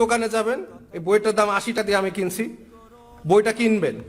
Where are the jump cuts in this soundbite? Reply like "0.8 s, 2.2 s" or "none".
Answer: 1.7 s